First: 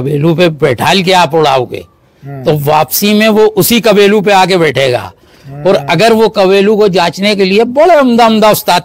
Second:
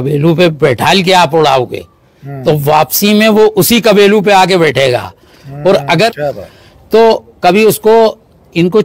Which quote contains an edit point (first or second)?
second